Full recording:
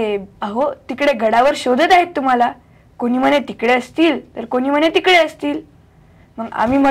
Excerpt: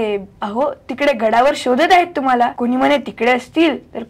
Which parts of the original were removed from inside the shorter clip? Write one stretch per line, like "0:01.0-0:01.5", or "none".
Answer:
0:02.6-0:03.0